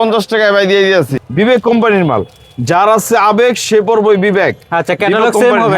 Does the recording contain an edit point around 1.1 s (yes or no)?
yes